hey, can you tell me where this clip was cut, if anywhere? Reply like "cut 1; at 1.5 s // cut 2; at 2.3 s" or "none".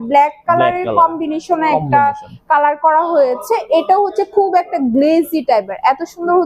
none